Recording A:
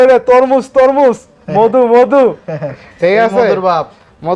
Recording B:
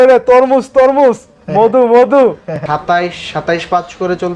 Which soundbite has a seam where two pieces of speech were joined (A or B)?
B